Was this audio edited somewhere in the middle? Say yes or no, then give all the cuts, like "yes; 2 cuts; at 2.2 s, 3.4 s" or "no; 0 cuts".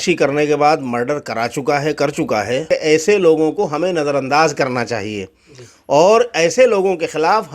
yes; 1 cut; at 2.6 s